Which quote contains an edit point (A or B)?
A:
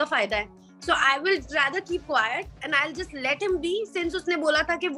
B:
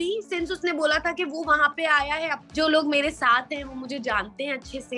B